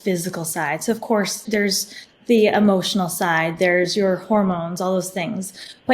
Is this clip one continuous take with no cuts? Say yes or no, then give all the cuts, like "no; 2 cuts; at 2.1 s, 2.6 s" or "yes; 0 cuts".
no; 1 cut; at 1.4 s